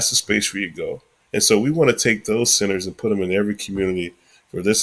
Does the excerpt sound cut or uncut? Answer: uncut